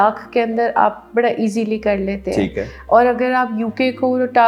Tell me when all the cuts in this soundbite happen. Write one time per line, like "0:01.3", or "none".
none